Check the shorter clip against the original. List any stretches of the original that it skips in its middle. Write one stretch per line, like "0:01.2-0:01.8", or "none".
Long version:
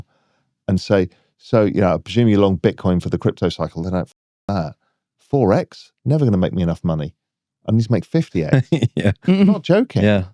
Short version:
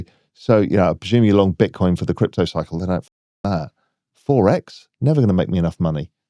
none